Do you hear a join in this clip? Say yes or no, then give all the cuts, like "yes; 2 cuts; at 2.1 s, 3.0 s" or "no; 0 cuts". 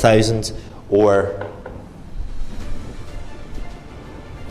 no; 0 cuts